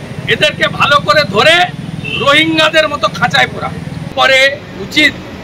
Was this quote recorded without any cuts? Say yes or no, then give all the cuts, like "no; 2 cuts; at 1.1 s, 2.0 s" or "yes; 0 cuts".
no; 1 cut; at 4.1 s